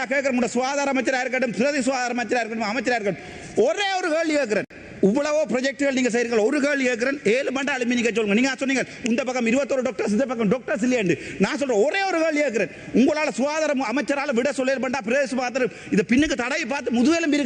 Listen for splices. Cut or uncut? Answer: uncut